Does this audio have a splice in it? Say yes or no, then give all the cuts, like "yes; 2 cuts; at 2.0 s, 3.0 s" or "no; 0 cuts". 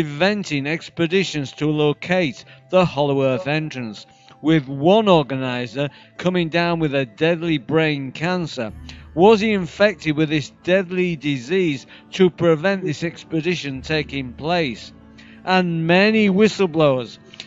no; 0 cuts